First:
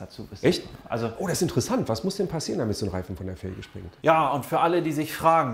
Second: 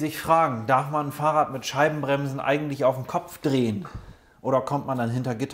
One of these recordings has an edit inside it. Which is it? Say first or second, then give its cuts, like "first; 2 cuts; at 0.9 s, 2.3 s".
first; 1 cut; at 4.0 s